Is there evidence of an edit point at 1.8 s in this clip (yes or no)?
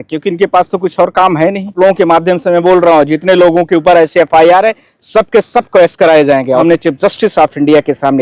yes